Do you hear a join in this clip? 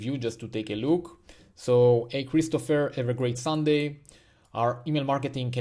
no; 0 cuts

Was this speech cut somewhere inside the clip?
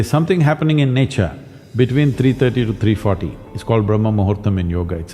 no; 0 cuts

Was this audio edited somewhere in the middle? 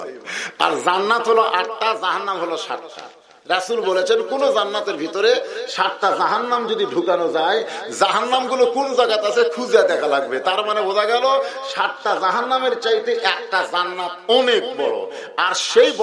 no; 0 cuts

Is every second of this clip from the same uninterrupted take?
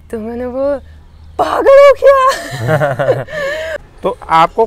no; 1 cut; at 3.7 s

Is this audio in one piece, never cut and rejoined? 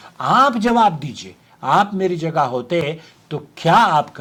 yes; 0 cuts

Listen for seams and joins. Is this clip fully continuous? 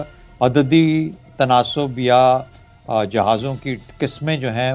yes; 0 cuts

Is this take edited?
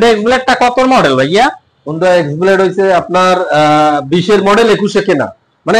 no; 0 cuts

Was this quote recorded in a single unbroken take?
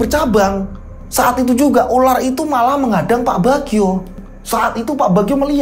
no; 1 cut; at 4.1 s

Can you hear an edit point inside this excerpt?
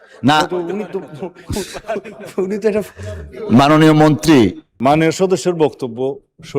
yes; 1 cut; at 4.7 s

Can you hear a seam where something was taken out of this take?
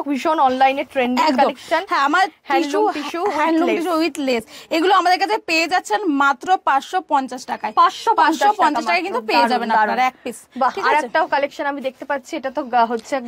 no; 0 cuts

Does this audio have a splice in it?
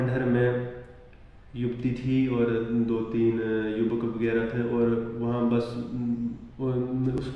no; 0 cuts

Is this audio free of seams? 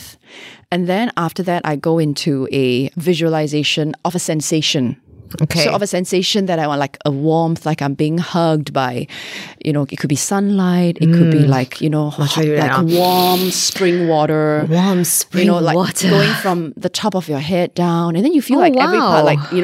no; 2 cuts; at 2.9 s, 4.0 s

